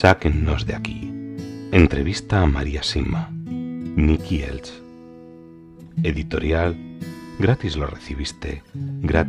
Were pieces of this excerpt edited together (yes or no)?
no